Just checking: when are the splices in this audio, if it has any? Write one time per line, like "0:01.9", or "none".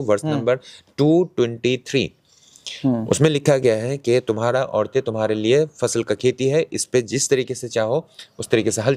none